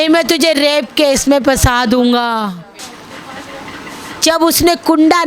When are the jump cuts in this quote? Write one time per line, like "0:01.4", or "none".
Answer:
0:02.8